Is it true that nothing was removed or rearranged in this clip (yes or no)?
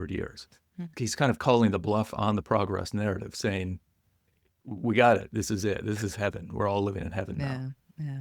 no